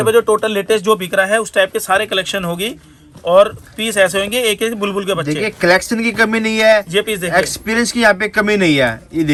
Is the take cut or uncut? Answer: uncut